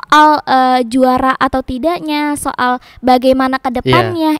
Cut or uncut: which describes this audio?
uncut